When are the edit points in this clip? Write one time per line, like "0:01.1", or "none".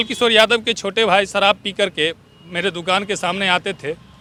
none